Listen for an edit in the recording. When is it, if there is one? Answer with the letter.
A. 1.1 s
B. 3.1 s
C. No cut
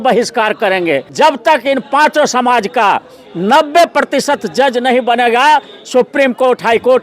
A